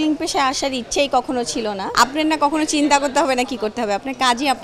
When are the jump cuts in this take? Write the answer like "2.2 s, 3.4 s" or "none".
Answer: 1.8 s

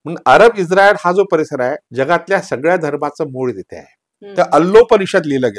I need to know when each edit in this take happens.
1.8 s, 4.2 s

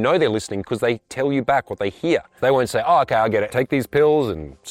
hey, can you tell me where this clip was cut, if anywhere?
2.4 s, 3.5 s

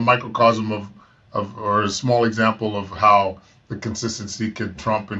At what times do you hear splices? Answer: none

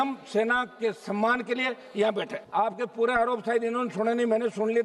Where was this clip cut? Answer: 2.5 s

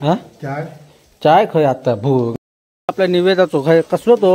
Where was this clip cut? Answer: 2.3 s

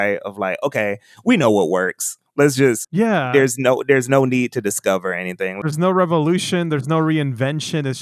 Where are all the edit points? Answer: 2.9 s, 5.6 s

